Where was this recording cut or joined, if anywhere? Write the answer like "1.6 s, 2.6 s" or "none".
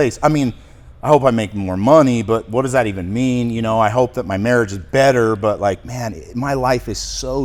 none

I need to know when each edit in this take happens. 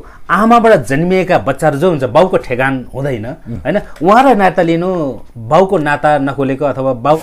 none

